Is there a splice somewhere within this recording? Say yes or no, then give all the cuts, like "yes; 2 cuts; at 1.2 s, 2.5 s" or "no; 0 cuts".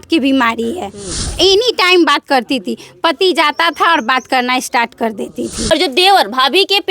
yes; 2 cuts; at 1.3 s, 5.6 s